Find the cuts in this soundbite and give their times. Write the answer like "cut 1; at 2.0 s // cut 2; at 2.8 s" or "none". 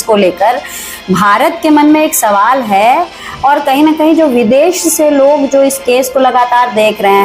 none